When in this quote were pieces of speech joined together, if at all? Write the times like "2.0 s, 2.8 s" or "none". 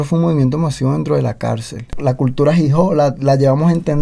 1.9 s